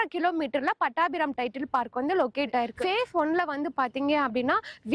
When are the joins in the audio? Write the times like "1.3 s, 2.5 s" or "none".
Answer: 2.7 s